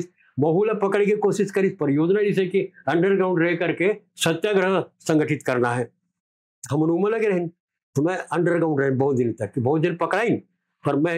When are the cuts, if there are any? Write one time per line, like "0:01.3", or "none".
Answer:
none